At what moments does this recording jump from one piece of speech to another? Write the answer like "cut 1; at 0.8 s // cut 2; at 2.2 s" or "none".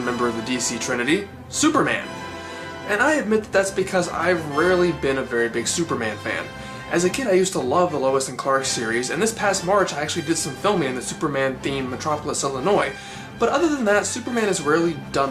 none